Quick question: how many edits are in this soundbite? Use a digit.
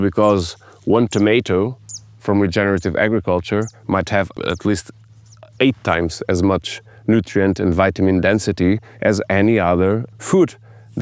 2